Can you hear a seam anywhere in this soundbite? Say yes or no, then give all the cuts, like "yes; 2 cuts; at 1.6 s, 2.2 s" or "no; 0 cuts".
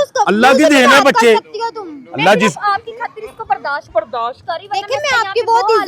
no; 0 cuts